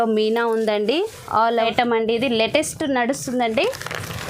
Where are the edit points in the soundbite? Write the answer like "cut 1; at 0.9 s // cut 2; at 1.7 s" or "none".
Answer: cut 1; at 1.5 s